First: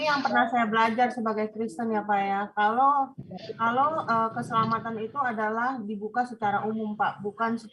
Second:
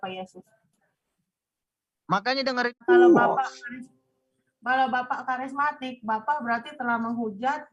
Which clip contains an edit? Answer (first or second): second